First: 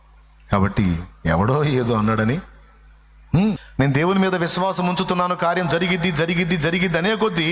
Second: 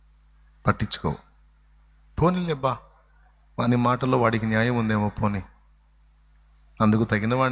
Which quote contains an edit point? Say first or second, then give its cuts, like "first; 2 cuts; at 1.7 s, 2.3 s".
first; 1 cut; at 3.7 s